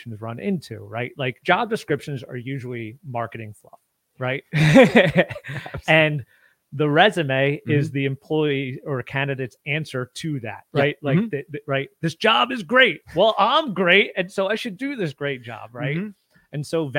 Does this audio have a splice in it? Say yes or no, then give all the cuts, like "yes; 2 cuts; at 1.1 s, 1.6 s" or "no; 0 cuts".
yes; 1 cut; at 1.4 s